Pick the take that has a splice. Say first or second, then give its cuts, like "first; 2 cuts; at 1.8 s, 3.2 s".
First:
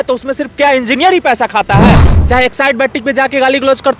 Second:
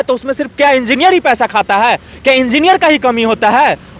first; 1 cut; at 2.1 s